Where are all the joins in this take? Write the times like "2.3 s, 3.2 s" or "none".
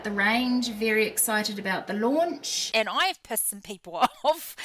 2.6 s